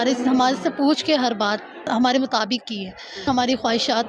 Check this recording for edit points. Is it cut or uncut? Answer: cut